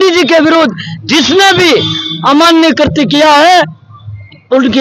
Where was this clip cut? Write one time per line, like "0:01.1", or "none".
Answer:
none